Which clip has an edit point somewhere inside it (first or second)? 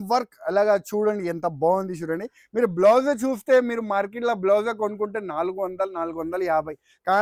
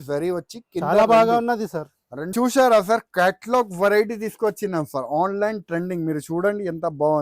second